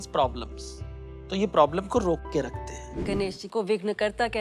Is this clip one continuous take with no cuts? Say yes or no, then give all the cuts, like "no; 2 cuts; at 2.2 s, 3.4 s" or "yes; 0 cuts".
no; 1 cut; at 3.0 s